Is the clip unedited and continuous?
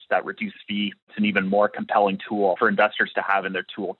no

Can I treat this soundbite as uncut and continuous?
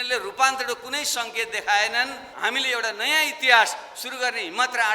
no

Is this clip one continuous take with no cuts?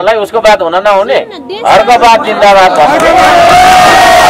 yes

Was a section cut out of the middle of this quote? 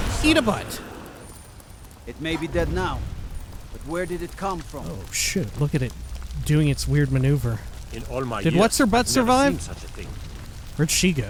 no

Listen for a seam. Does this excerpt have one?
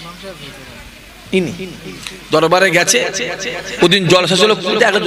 yes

